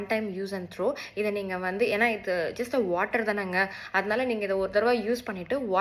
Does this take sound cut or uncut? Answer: uncut